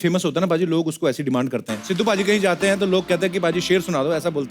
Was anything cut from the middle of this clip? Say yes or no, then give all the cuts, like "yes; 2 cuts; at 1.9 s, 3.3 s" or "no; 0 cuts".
yes; 1 cut; at 1.8 s